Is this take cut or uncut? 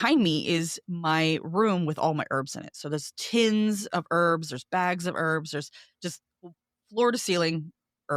uncut